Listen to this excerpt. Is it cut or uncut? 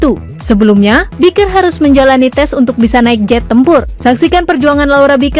cut